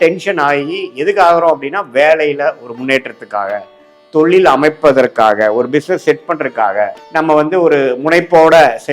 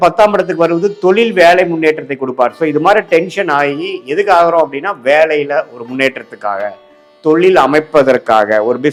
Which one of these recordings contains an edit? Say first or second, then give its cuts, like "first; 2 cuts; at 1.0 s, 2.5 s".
first; 1 cut; at 7.0 s